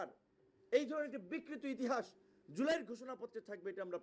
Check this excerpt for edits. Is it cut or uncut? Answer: uncut